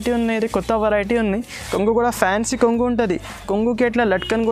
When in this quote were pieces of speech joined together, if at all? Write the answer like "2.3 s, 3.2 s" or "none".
1.6 s